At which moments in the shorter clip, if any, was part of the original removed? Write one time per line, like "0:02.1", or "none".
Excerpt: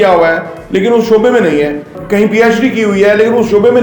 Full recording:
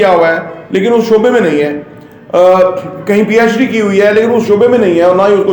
0:01.9